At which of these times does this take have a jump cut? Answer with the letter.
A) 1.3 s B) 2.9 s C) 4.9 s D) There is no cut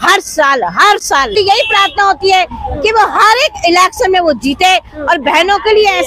A